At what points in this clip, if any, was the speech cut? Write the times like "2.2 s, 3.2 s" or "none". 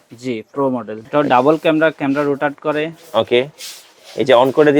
1.0 s